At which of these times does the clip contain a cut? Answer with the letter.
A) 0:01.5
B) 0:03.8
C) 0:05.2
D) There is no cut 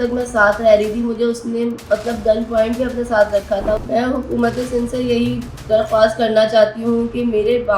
B